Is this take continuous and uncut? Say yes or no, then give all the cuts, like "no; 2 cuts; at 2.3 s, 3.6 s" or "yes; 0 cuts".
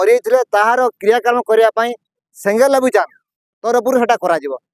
yes; 0 cuts